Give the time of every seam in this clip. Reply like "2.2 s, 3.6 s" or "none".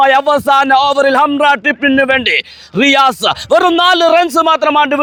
none